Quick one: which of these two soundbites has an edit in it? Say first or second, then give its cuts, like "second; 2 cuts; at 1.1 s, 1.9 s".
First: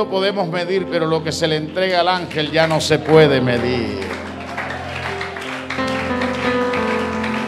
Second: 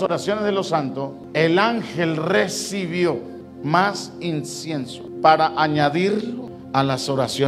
second; 4 cuts; at 1.2 s, 3.4 s, 5.0 s, 6.5 s